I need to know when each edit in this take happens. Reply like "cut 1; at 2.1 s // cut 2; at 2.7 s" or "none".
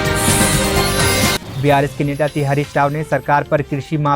cut 1; at 1.4 s